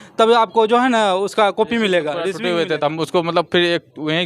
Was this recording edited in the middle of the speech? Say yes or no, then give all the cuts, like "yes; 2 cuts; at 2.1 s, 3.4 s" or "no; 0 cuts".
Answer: yes; 1 cut; at 2.4 s